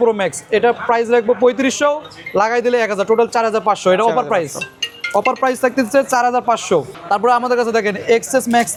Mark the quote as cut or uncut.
uncut